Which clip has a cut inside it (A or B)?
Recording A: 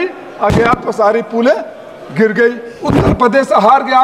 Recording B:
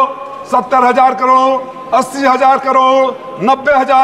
A